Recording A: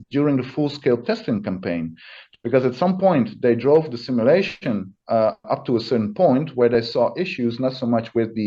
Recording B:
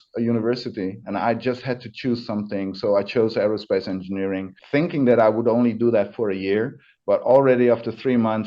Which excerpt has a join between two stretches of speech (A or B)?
B